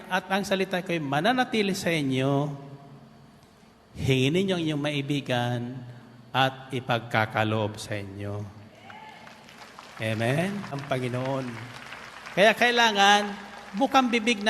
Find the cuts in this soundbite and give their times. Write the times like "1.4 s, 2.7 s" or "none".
10.8 s

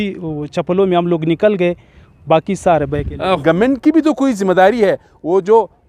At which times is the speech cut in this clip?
3.4 s

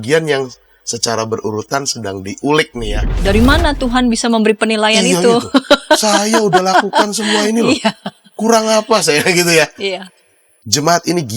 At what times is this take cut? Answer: 3.0 s

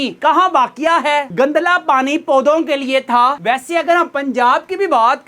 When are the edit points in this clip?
none

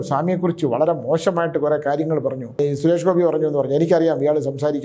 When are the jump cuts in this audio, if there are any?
2.6 s

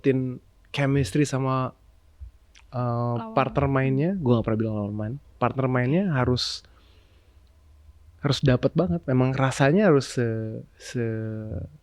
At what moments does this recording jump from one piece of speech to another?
none

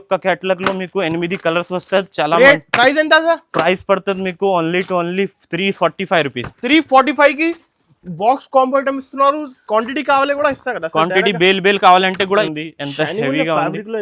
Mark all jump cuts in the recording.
12.5 s

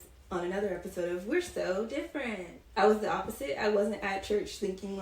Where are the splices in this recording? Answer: 2.5 s

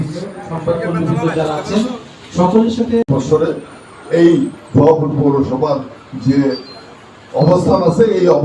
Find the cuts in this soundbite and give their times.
3.1 s

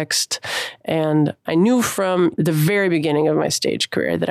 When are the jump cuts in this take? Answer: 2.3 s

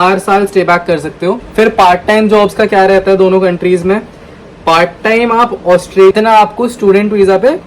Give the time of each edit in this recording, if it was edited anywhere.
1.4 s, 6.1 s

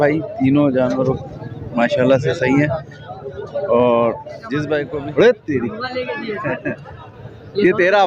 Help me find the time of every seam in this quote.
4.9 s

